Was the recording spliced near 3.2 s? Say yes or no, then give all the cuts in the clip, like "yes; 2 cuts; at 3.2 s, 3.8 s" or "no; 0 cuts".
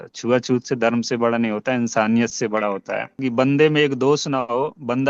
yes; 1 cut; at 3.2 s